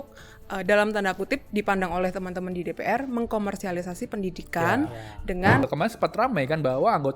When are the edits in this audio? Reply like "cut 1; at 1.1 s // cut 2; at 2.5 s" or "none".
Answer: cut 1; at 5.6 s